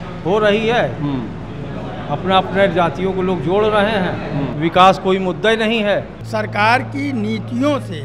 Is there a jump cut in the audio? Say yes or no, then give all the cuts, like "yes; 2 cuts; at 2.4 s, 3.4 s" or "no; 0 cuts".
yes; 1 cut; at 6.2 s